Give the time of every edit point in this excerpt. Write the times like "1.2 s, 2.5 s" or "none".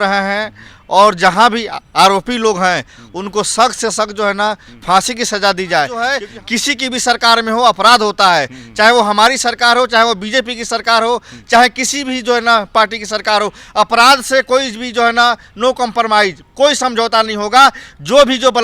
6.2 s